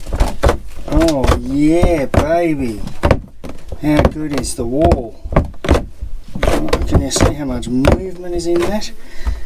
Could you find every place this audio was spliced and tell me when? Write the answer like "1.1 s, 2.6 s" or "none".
none